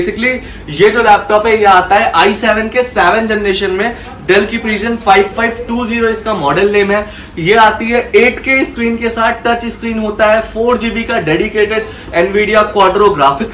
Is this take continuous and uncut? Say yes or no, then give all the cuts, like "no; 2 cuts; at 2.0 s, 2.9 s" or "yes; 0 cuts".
yes; 0 cuts